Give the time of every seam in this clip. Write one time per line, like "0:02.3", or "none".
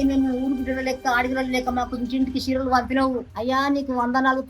none